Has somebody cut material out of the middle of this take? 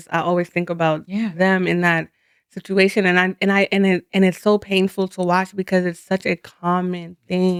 no; 0 cuts

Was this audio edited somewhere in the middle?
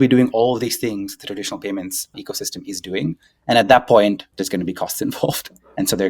yes; 2 cuts; at 2.2 s, 4.3 s

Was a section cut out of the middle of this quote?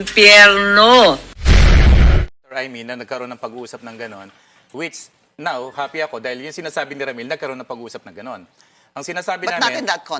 yes; 1 cut; at 2.3 s

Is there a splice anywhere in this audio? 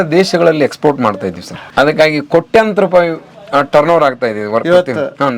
yes; 1 cut; at 1.6 s

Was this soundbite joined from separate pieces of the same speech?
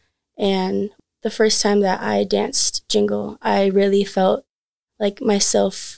yes; 1 cut; at 0.9 s

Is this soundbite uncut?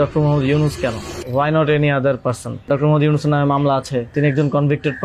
no; 3 cuts; at 1.1 s, 2.7 s, 4.1 s

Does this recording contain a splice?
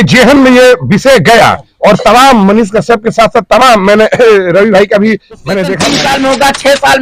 yes; 1 cut; at 5.8 s

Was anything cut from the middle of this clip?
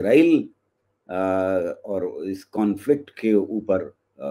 no; 0 cuts

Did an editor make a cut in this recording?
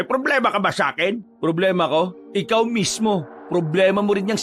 yes; 3 cuts; at 1.3 s, 2.2 s, 3.3 s

